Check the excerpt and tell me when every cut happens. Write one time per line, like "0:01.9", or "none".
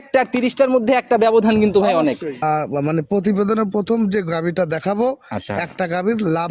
0:02.3